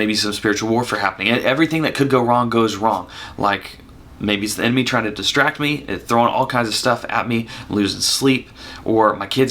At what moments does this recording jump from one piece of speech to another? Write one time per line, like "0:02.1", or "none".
none